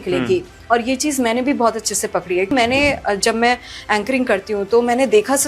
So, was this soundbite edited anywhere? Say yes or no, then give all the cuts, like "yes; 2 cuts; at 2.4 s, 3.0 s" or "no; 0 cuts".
yes; 1 cut; at 2.5 s